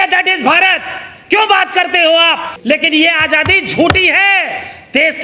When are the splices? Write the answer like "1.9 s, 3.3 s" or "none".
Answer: 2.5 s